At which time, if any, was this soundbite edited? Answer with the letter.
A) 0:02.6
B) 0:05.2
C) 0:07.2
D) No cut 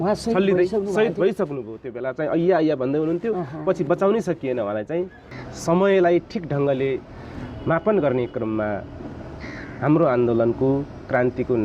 B